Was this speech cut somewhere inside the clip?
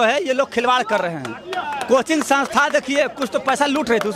no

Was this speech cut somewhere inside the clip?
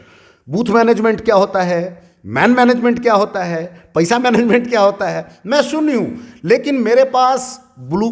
no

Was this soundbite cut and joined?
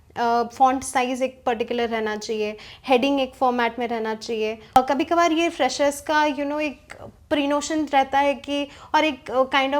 yes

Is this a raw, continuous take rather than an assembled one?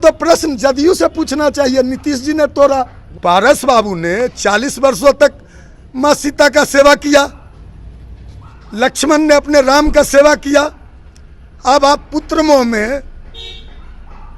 no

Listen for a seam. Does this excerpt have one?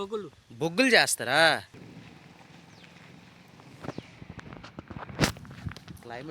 yes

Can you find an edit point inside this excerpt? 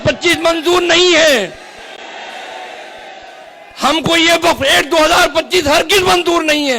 no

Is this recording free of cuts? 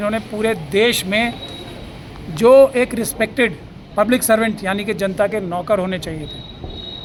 yes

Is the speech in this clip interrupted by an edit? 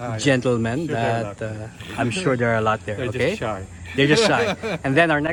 no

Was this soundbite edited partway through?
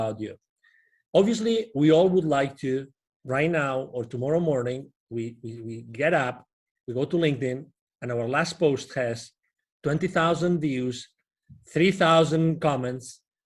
no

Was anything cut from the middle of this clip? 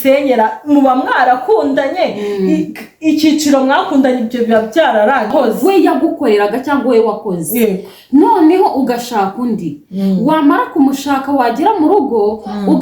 yes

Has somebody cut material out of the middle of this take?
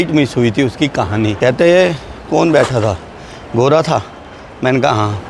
yes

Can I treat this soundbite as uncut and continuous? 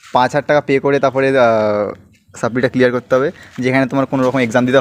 yes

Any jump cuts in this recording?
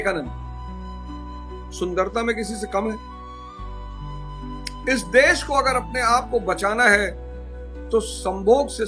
yes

